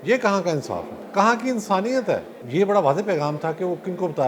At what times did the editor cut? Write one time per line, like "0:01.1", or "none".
0:01.0
0:02.4